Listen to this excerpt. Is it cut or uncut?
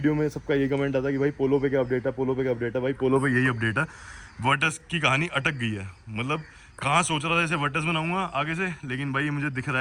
uncut